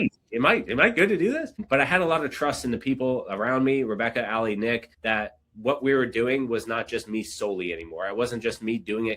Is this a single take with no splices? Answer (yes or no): no